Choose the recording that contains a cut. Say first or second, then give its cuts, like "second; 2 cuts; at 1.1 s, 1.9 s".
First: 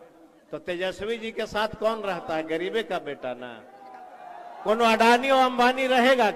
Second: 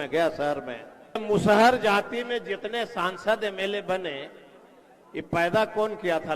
second; 1 cut; at 1.2 s